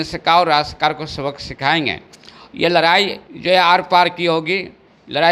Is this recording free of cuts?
yes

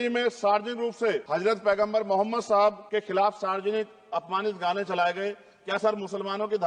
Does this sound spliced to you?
yes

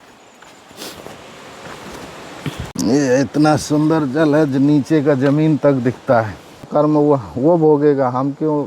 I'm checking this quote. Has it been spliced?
yes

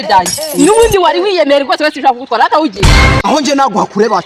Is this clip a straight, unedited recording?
yes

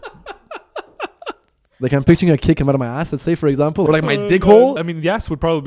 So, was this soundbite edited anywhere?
yes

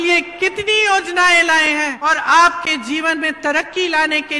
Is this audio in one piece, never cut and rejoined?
no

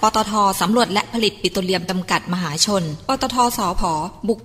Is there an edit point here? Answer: no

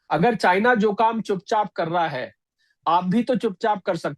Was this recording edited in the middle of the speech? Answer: no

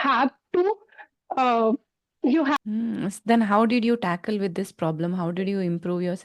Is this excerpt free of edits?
no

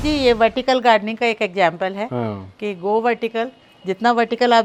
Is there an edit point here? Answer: no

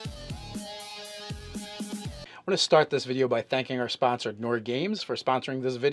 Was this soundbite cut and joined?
yes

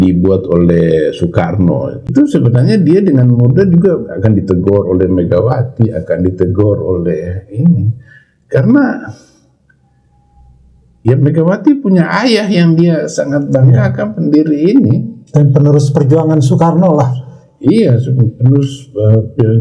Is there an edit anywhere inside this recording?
yes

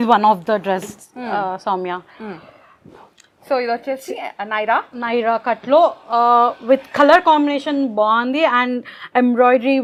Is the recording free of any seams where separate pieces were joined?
yes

